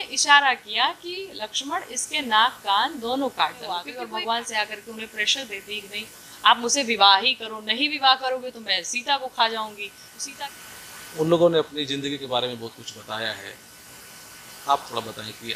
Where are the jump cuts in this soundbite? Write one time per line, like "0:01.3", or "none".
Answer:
0:04.0
0:10.5